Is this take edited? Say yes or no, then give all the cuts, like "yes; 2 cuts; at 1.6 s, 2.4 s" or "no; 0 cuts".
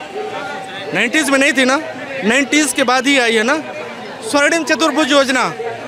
no; 0 cuts